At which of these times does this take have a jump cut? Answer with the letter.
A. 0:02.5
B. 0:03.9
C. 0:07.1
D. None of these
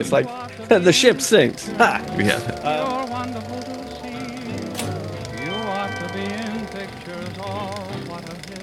A